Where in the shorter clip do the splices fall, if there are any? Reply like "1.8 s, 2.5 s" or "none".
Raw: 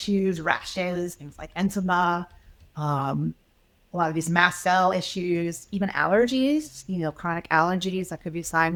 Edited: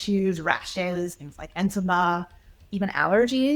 2.6 s